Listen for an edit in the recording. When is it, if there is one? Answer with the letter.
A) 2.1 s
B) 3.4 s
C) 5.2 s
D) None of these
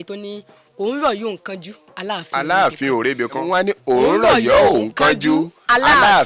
B